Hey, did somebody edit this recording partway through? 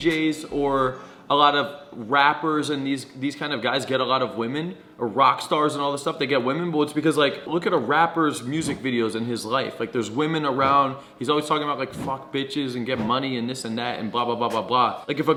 no; 0 cuts

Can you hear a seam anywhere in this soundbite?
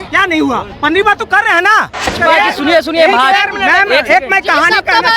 yes; 1 cut; at 2.1 s

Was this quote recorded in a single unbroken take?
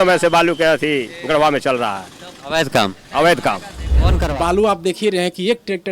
no; 1 cut; at 4.0 s

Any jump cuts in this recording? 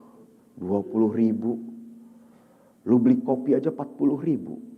no; 0 cuts

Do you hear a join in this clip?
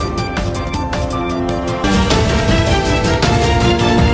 yes; 1 cut; at 1.6 s

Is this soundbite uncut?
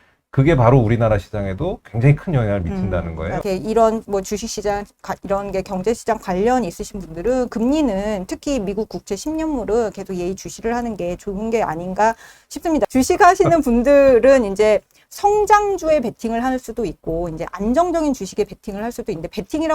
no; 2 cuts; at 3.4 s, 12.9 s

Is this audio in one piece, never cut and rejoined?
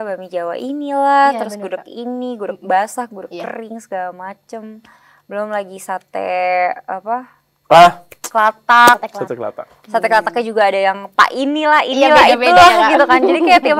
yes; 0 cuts

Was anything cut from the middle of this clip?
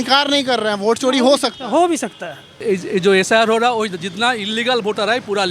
yes; 1 cut; at 2.5 s

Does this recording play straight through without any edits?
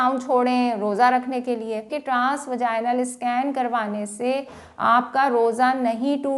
no; 1 cut; at 2.0 s

